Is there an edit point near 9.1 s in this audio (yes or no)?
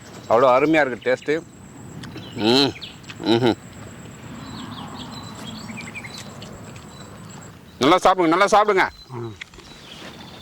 no